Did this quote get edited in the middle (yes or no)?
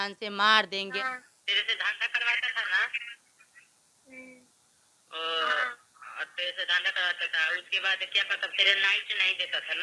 yes